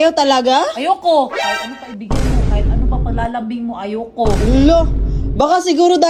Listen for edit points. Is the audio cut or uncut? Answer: uncut